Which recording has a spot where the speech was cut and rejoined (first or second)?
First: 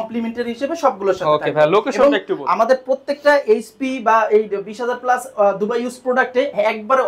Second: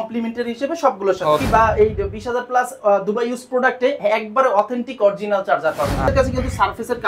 second